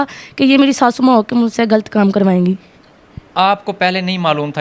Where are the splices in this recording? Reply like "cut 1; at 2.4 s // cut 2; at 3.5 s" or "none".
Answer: none